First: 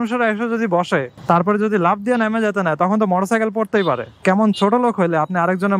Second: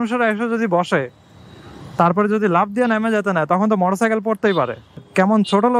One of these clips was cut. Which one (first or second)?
first